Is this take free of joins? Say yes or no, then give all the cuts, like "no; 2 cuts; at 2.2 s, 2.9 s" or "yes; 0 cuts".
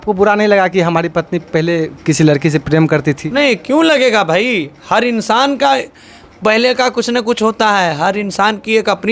yes; 0 cuts